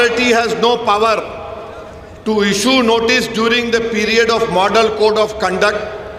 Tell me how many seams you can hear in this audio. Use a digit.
0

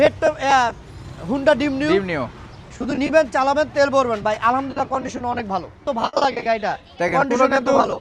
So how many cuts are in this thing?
1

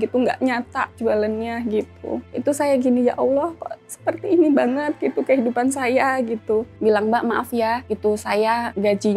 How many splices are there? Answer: 2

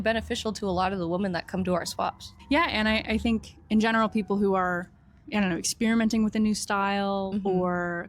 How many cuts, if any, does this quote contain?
2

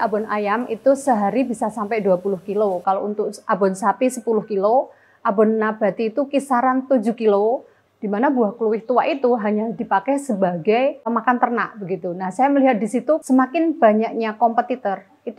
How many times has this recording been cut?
2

